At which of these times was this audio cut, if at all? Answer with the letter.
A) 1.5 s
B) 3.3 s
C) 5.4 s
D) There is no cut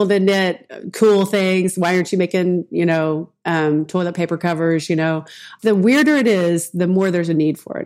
C